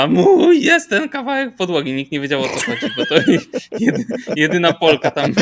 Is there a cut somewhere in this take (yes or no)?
no